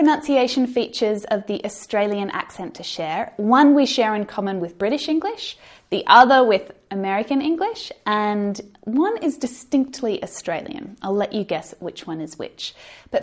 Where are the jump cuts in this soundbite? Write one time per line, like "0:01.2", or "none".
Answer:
none